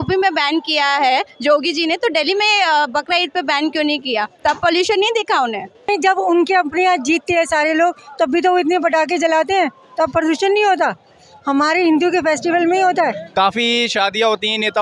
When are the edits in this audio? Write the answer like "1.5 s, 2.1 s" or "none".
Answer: 5.9 s, 13.2 s